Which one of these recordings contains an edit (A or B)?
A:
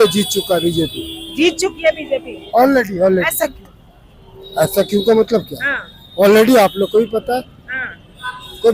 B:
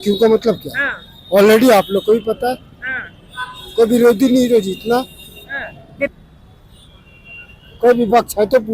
B